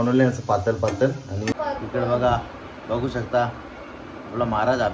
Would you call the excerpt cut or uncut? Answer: cut